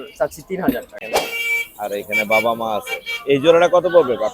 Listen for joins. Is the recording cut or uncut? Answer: cut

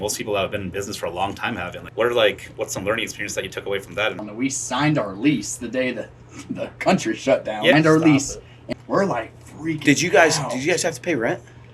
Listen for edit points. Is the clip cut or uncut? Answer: cut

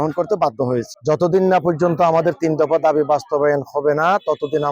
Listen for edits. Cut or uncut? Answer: cut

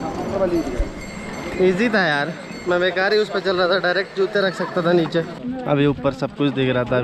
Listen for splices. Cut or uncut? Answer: cut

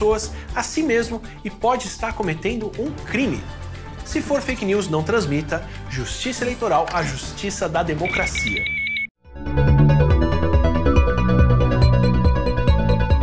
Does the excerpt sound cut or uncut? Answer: cut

